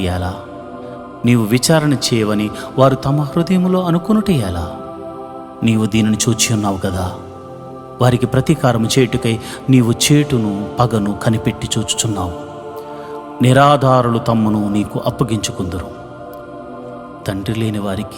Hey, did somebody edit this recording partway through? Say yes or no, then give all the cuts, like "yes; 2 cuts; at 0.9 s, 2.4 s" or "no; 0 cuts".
yes; 2 cuts; at 15.8 s, 17.2 s